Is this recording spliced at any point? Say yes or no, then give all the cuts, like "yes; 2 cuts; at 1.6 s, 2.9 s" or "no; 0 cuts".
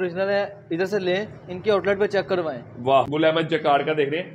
yes; 1 cut; at 3.1 s